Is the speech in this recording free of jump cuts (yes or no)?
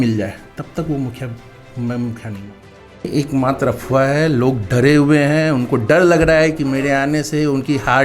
no